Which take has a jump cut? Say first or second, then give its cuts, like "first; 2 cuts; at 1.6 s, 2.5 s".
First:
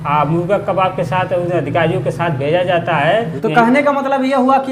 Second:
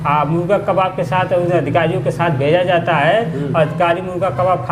first; 1 cut; at 3.3 s